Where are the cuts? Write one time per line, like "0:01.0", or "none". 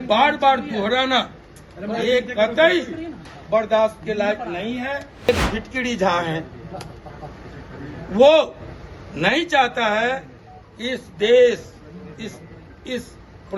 0:05.3